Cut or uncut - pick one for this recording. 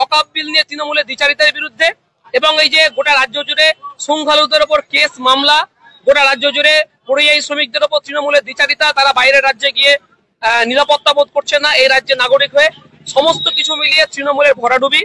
uncut